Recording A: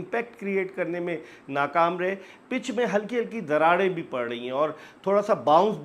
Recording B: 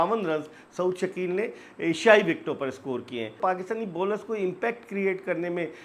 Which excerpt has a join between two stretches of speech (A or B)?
B